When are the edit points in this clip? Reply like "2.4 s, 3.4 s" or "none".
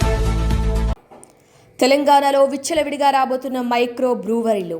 0.9 s